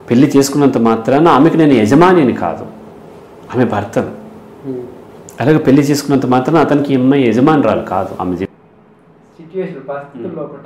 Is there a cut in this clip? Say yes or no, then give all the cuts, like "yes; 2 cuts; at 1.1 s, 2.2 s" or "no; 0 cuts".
yes; 1 cut; at 8.5 s